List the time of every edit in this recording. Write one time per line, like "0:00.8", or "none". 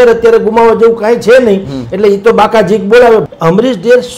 0:03.3